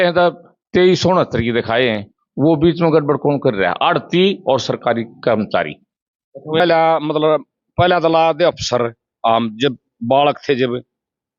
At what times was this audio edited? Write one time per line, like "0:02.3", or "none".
0:06.6